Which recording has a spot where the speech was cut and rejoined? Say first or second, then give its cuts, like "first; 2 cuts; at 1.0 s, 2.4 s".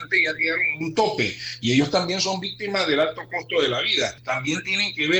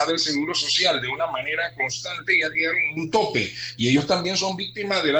first; 1 cut; at 4.2 s